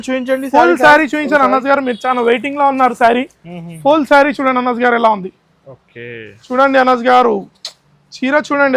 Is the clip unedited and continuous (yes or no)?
yes